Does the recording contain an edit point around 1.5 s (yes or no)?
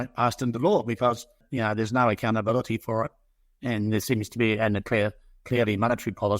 yes